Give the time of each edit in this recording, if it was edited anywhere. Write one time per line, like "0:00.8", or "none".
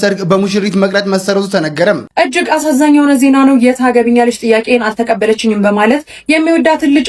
0:02.1